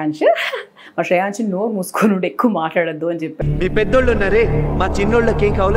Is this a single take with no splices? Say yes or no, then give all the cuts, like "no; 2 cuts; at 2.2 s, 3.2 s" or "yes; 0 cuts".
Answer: yes; 0 cuts